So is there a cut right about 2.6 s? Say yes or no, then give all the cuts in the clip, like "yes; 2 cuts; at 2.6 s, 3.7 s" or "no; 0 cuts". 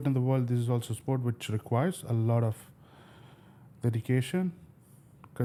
no; 0 cuts